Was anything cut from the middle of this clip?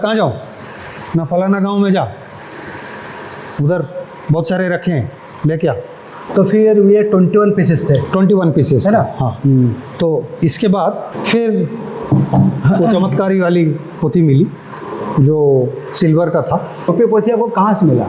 yes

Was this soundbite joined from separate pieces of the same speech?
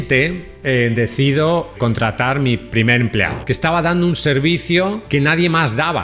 yes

